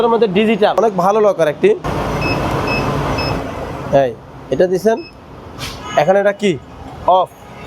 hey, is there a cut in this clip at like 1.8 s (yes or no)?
yes